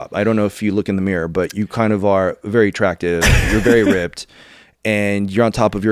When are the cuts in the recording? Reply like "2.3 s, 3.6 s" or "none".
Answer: none